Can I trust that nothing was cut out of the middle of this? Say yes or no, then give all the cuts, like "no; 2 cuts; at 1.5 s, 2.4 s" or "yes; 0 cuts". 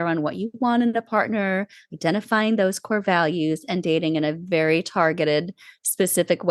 yes; 0 cuts